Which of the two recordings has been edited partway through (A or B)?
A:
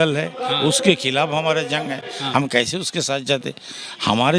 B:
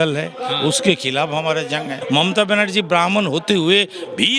B